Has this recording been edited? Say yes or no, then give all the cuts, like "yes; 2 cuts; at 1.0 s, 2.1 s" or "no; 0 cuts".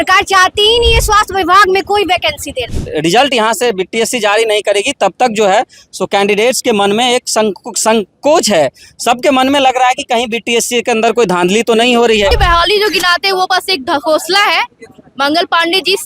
yes; 2 cuts; at 2.7 s, 12.3 s